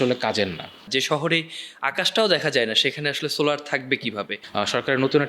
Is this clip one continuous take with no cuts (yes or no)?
no